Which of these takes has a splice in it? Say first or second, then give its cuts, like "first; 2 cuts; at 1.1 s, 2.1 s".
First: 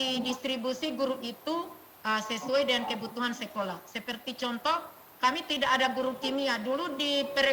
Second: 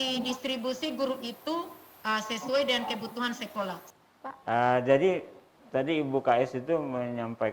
second; 1 cut; at 3.9 s